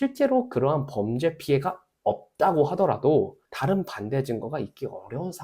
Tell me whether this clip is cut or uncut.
cut